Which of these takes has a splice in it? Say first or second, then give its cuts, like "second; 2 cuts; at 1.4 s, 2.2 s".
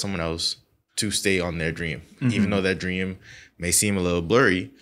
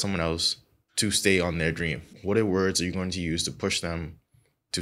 second; 1 cut; at 2.1 s